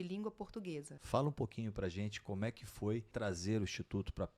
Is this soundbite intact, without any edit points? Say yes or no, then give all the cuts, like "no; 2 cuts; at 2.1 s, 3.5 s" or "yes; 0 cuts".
no; 2 cuts; at 0.9 s, 3.1 s